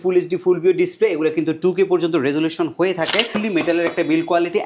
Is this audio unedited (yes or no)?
no